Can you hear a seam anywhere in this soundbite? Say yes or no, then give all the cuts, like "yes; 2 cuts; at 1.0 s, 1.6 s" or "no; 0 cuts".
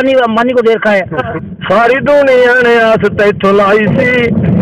yes; 1 cut; at 1.4 s